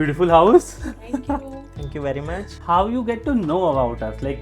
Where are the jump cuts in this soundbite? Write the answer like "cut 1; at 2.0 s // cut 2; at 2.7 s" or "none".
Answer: cut 1; at 2.6 s